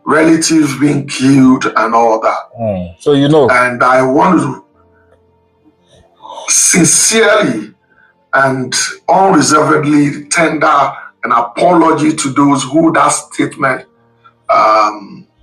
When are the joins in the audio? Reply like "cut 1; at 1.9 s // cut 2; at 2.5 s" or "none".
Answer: none